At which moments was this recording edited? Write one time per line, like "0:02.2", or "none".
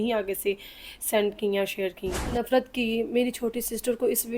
0:02.4